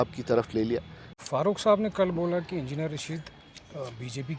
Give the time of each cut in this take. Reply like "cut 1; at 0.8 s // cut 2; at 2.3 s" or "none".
cut 1; at 1.1 s